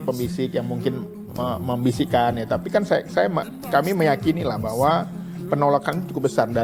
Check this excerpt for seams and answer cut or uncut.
uncut